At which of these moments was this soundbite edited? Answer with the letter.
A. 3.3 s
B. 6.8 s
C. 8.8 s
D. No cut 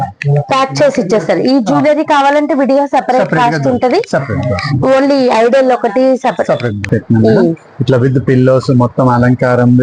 B